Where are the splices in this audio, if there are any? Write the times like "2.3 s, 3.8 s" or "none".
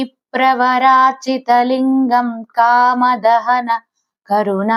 none